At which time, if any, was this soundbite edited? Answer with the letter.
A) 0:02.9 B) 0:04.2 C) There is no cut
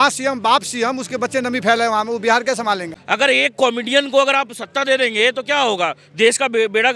A